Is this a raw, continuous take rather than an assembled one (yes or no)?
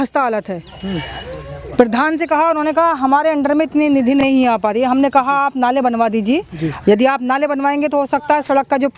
yes